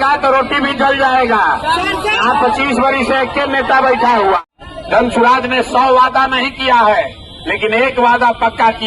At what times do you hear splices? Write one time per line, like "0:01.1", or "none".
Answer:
0:04.5

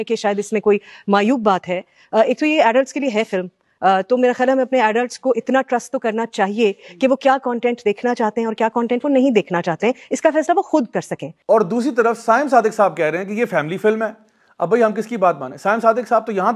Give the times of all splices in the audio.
none

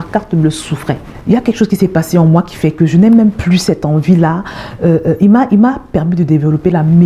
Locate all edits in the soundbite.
0:01.1

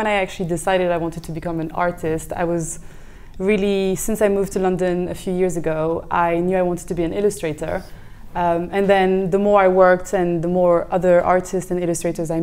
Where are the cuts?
none

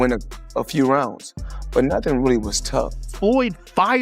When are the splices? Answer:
0:03.0

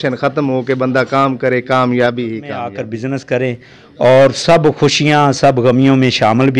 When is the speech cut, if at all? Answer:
0:02.8

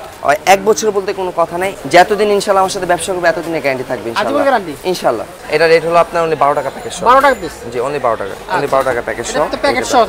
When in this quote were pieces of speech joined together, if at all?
0:01.6
0:05.4

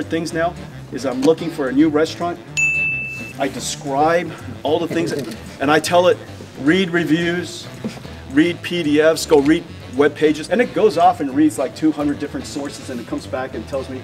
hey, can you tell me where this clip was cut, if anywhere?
0:08.0
0:10.4

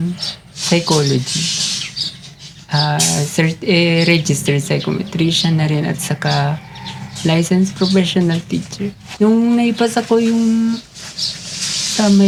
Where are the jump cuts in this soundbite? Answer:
none

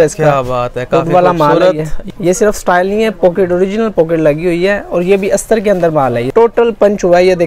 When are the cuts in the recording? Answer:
0:01.9
0:06.3

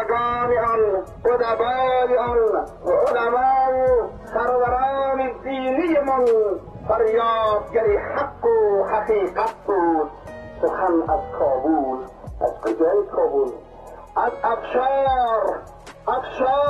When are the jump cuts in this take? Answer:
0:01.1
0:02.7
0:04.2
0:06.7

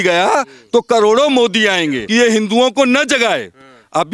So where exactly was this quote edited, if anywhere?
0:02.0

